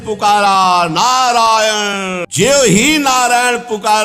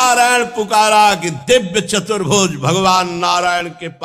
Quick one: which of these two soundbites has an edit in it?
first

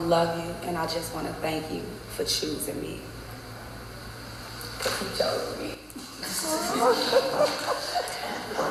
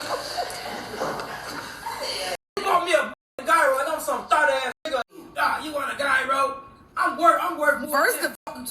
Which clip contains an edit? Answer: second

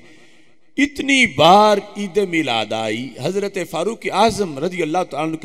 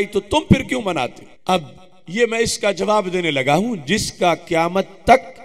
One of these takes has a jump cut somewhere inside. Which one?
second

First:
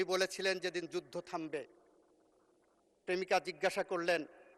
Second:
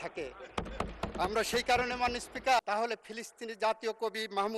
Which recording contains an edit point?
second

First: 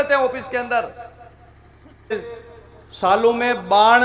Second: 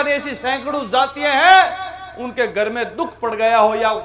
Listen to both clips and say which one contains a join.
first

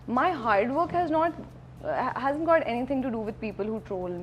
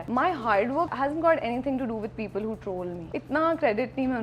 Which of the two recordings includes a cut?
second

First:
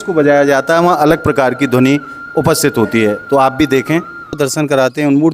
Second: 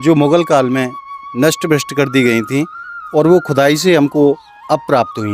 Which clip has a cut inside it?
first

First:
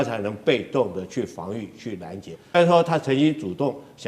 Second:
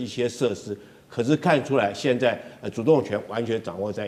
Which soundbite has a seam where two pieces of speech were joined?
first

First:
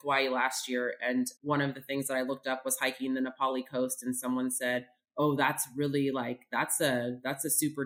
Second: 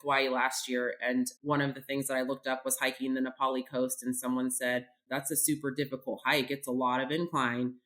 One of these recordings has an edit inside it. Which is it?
second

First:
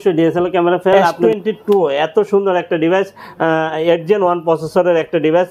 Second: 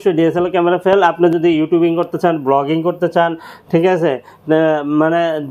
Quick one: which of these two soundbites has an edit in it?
first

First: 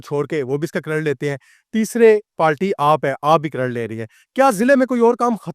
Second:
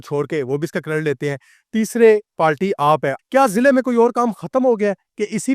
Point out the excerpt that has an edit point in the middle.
second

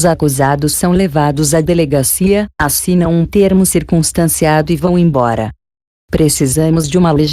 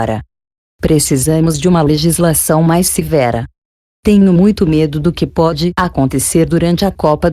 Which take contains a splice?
second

